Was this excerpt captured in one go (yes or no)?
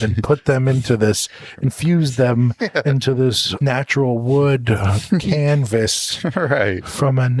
no